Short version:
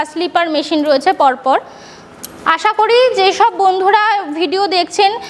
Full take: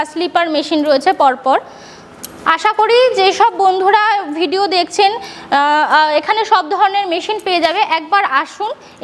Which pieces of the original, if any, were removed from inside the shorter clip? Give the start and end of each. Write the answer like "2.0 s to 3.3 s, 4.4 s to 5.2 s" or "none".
none